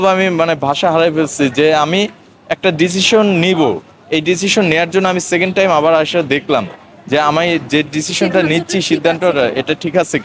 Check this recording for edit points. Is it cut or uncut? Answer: uncut